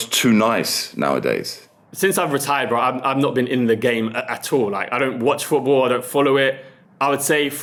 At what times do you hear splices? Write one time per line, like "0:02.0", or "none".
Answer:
none